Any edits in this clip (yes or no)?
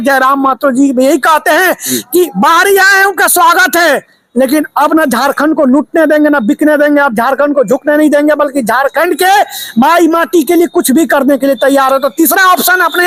no